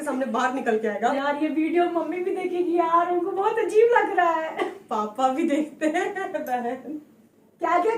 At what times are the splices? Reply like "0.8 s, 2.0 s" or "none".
1.1 s

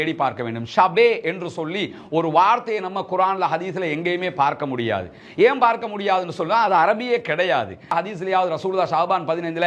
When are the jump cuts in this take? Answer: 7.9 s

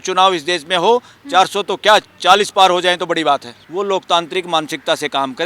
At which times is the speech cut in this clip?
3.6 s

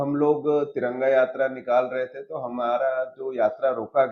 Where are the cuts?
none

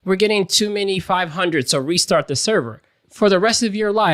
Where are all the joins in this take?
3.0 s

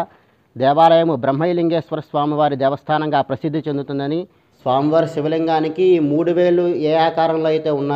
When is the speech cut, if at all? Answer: 4.4 s

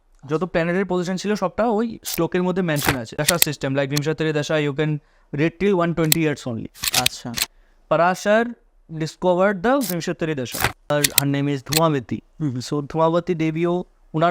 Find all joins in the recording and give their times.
3.1 s, 10.9 s

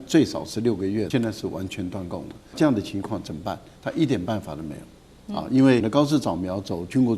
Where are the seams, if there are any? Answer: 1.1 s, 2.5 s, 5.9 s

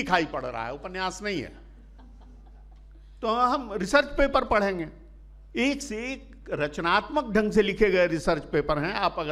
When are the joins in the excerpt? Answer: none

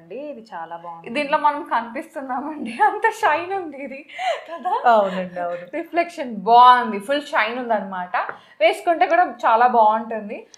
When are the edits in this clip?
none

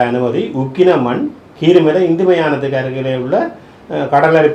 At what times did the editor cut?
none

